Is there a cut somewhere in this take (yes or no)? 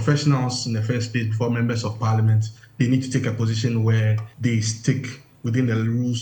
yes